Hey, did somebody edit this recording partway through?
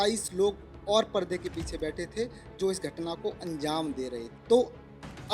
yes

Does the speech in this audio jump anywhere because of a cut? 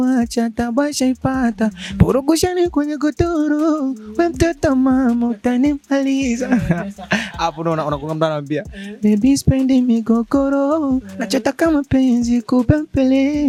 no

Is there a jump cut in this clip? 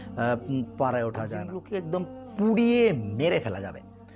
yes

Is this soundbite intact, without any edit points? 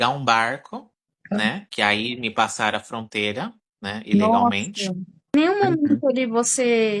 no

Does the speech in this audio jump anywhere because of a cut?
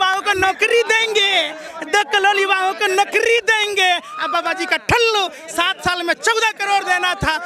no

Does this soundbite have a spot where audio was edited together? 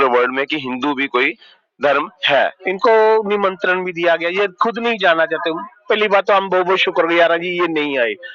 yes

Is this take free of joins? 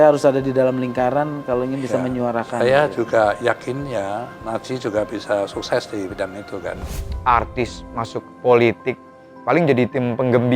no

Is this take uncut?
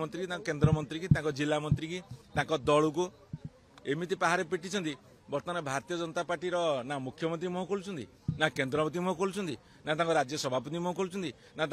yes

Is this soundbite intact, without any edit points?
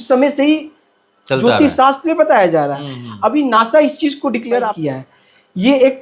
no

